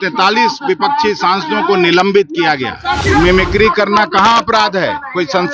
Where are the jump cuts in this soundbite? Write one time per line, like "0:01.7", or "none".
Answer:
0:03.0